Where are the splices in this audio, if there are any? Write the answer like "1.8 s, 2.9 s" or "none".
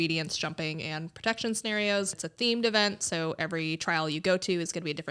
2.2 s